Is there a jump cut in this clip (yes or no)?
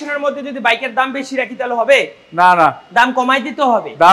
no